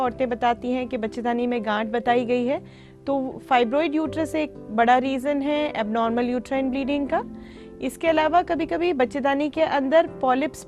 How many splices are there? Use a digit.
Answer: 0